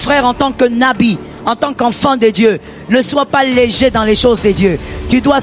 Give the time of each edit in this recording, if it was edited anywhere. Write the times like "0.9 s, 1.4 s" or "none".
none